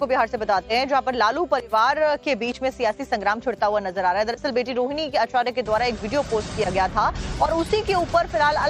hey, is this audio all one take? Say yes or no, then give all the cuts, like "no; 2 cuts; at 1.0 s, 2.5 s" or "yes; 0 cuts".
no; 1 cut; at 3.0 s